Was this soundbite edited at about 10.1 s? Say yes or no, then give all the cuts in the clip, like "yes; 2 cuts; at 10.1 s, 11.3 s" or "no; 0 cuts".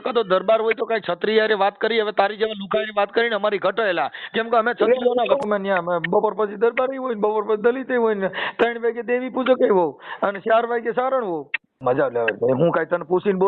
no; 2 cuts; at 5.4 s, 11.8 s